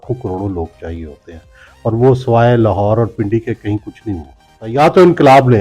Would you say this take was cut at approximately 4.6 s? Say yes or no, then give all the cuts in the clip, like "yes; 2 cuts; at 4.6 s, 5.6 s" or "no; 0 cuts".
yes; 1 cut; at 4.6 s